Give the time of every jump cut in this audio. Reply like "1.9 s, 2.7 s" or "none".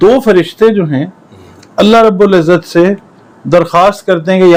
none